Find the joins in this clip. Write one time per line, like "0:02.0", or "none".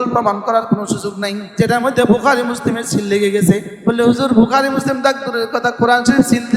0:01.5
0:03.7